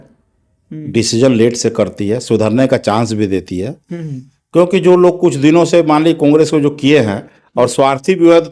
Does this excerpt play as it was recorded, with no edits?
yes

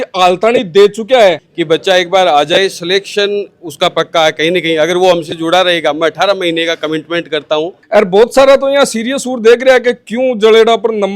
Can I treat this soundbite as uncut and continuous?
no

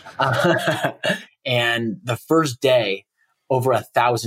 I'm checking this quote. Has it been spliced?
yes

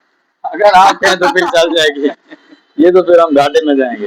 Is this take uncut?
yes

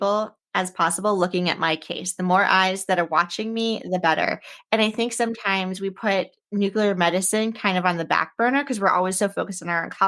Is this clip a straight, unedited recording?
yes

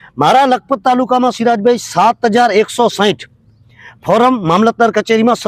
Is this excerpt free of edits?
yes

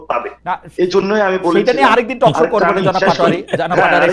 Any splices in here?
no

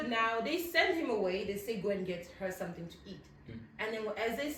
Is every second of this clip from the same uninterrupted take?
yes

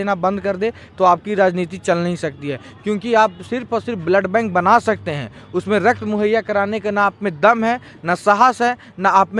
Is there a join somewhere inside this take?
no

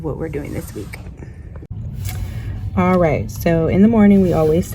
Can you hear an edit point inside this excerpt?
no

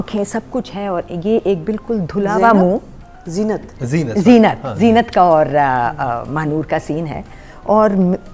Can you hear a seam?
no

